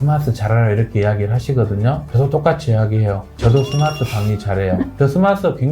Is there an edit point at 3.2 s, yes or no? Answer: no